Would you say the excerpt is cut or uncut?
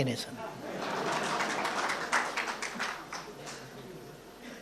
uncut